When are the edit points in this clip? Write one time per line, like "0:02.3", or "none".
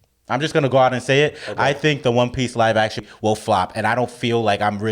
0:03.0